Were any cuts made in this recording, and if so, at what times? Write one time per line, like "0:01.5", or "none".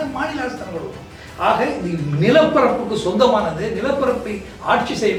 none

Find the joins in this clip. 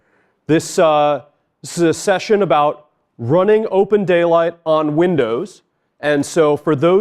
none

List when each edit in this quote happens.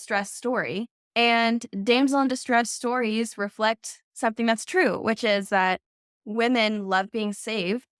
0:01.0
0:06.1

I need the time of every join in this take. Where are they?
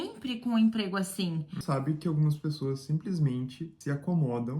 0:01.6
0:03.7

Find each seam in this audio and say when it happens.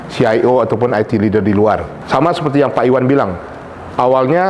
0:01.9

